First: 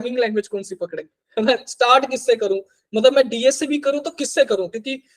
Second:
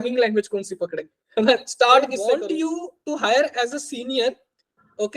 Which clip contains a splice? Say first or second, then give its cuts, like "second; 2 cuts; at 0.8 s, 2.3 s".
second; 1 cut; at 2.3 s